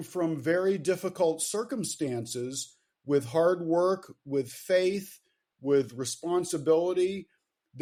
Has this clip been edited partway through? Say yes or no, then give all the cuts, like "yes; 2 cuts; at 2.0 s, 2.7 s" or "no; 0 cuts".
no; 0 cuts